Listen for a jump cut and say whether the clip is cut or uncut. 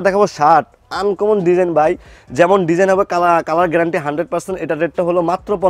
uncut